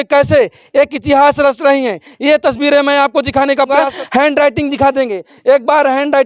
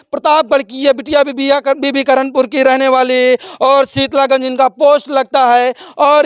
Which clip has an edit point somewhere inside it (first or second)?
first